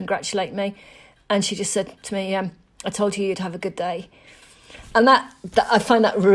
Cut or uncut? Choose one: uncut